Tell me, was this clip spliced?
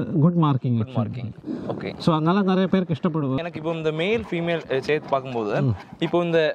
yes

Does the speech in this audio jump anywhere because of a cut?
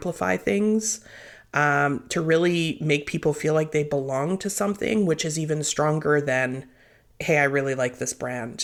no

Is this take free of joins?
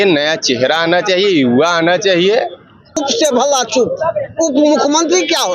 no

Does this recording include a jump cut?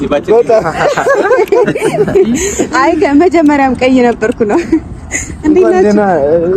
no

